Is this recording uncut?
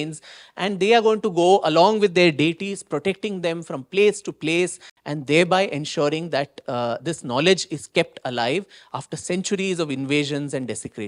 yes; 0 cuts

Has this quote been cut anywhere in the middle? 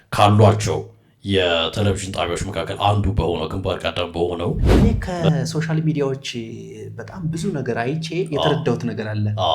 yes; 1 cut; at 4.7 s

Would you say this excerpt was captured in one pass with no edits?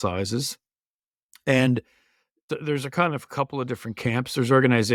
yes; 0 cuts

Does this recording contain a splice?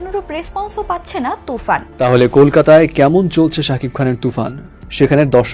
yes; 1 cut; at 2.0 s

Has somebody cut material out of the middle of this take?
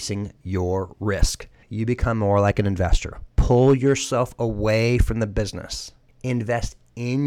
yes; 1 cut; at 1.6 s

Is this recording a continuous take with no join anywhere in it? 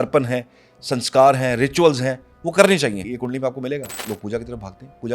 no; 2 cuts; at 3.1 s, 3.9 s

